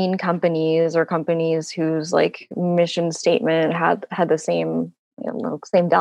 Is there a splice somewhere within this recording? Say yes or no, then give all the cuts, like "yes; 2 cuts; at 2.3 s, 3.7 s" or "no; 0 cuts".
no; 0 cuts